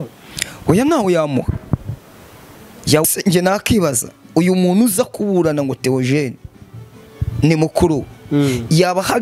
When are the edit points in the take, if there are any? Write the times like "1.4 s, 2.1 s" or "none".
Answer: 3.1 s